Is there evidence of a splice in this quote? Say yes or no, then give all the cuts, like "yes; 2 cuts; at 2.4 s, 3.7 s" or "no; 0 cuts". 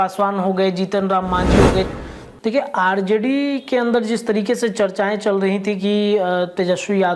yes; 1 cut; at 1.9 s